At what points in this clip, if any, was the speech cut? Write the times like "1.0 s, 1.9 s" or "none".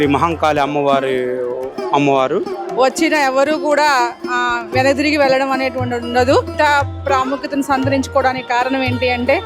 2.6 s, 6.5 s